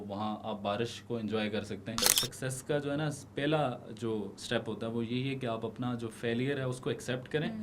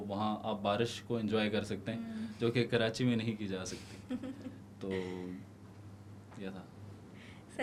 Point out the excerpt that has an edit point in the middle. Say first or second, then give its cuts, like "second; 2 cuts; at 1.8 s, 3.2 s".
first; 2 cuts; at 2.0 s, 4.4 s